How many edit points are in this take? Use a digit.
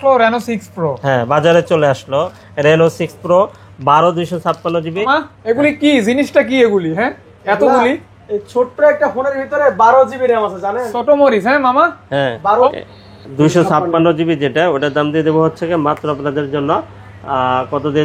2